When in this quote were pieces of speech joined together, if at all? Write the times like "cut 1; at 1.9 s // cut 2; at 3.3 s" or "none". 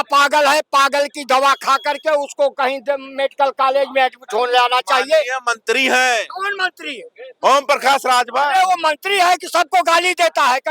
none